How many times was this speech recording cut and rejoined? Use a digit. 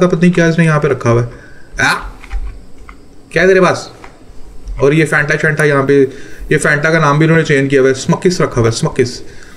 0